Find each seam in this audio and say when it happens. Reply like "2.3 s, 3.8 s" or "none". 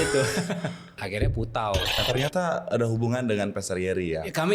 1.0 s, 2.0 s

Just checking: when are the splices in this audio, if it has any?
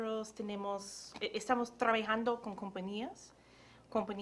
none

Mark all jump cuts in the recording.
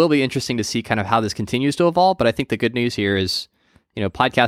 none

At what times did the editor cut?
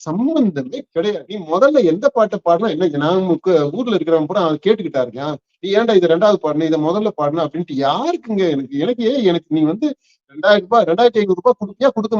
1.3 s

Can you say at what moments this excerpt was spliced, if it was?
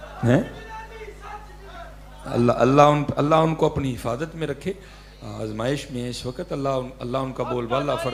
none

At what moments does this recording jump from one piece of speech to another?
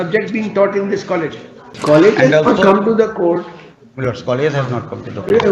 1.7 s

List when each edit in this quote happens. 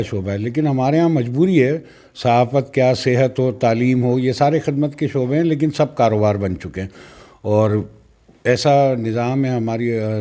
none

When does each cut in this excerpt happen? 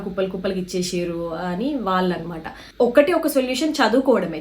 2.6 s

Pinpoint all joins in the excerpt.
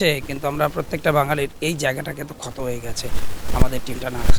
none

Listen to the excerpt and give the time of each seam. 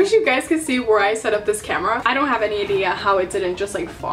2.0 s

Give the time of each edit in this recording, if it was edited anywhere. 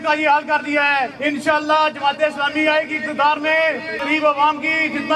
1.1 s, 4.0 s

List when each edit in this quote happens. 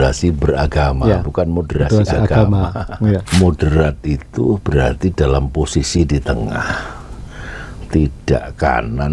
3.2 s

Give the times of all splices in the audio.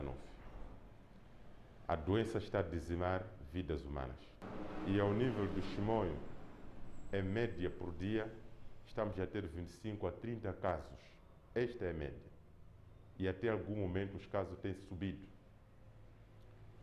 none

